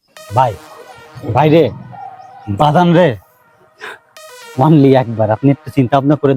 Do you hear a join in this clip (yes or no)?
no